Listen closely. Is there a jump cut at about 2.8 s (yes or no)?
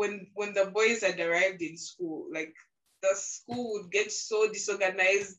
yes